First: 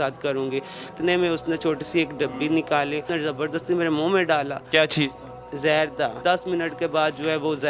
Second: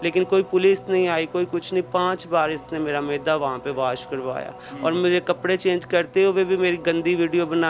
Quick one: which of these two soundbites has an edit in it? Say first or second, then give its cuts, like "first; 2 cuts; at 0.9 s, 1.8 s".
first; 3 cuts; at 0.9 s, 3.1 s, 6.2 s